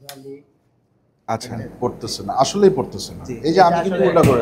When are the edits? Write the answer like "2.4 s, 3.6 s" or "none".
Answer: 1.6 s